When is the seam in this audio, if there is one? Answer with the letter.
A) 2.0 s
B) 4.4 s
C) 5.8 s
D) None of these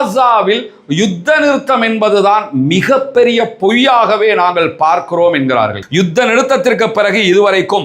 C